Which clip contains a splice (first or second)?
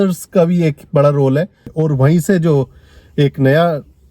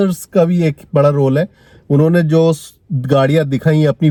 first